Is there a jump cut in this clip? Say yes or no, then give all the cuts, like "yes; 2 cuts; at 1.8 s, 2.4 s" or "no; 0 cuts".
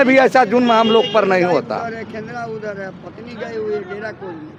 no; 0 cuts